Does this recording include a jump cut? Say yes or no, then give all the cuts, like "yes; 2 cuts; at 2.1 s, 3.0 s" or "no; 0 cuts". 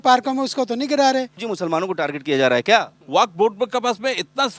yes; 2 cuts; at 1.5 s, 3.0 s